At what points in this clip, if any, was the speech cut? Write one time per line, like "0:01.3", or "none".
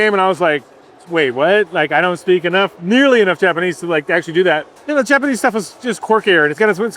0:04.7